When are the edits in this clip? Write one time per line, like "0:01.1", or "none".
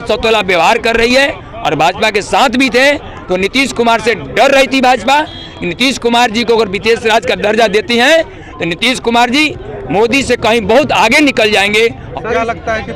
0:12.0